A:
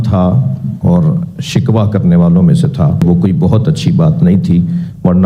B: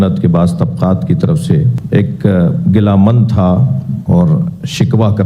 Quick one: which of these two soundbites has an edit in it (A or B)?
A